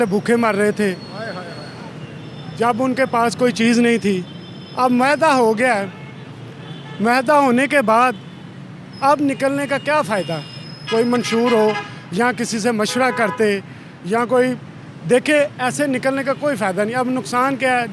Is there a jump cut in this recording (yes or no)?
no